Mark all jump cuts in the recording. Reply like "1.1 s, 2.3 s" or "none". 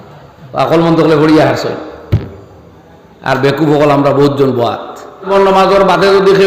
5.3 s

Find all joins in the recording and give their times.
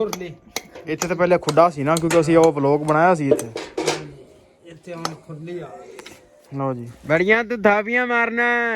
7.0 s

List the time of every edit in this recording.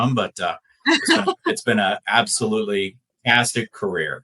3.1 s

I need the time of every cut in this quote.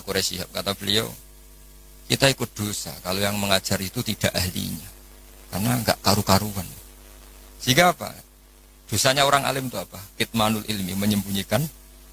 none

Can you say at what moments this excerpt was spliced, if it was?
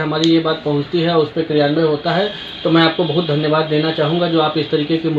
none

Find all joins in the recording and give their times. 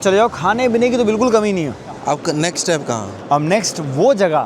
2.0 s

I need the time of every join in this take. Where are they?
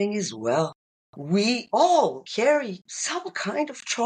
1.3 s, 2.4 s

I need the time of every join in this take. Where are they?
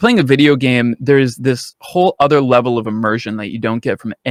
none

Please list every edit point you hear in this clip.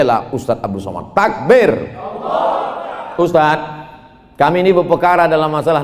2.9 s

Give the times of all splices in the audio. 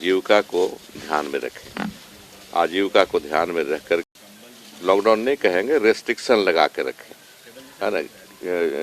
4.1 s

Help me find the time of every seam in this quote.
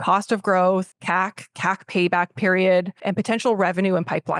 0.9 s, 3.0 s

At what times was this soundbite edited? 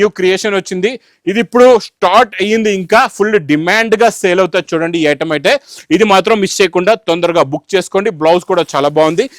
none

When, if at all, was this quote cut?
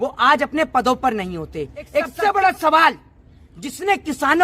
2.1 s

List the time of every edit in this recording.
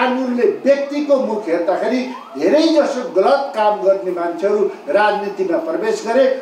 none

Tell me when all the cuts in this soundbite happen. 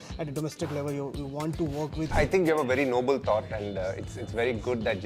2.1 s

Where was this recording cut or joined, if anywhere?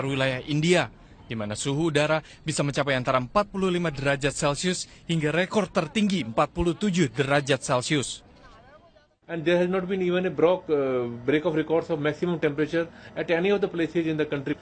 11.1 s

